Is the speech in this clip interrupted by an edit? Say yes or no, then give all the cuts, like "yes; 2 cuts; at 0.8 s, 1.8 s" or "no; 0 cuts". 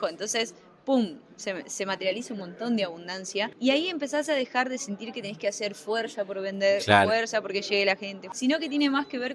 yes; 2 cuts; at 3.5 s, 8.2 s